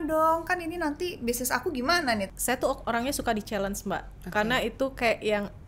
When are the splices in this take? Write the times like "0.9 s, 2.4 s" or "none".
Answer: 2.3 s